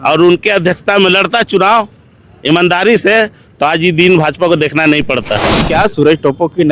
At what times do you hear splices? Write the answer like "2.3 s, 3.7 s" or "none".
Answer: 5.6 s

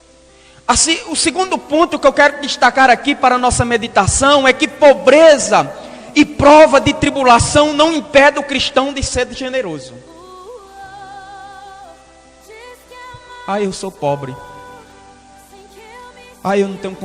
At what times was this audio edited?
10.1 s, 13.4 s

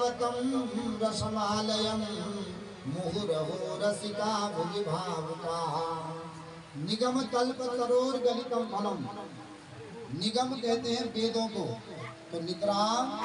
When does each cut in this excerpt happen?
none

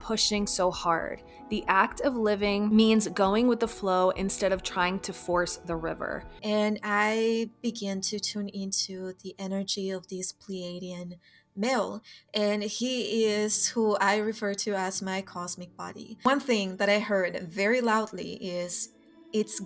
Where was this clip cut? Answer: 2.7 s, 6.3 s, 16.3 s

